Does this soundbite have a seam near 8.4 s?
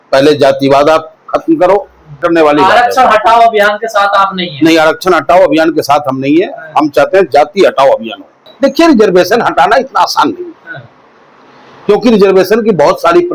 yes; 2 cuts; at 2.2 s, 8.4 s

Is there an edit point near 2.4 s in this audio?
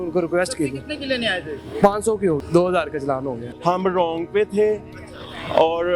yes; 2 cuts; at 2.4 s, 3.4 s

